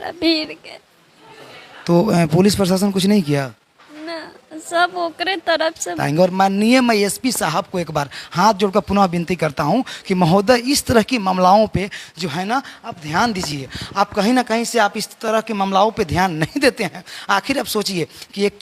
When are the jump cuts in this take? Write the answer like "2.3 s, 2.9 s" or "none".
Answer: 6.0 s